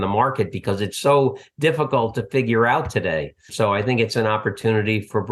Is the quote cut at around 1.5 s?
no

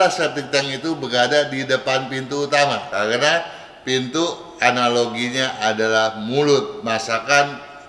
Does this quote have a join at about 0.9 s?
no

